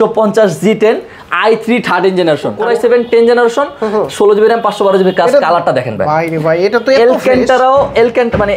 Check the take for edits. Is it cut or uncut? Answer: cut